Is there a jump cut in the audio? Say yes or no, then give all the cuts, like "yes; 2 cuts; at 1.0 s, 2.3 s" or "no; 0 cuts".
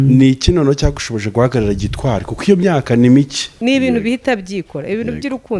yes; 1 cut; at 3.4 s